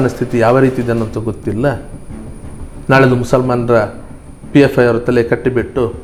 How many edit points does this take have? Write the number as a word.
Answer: zero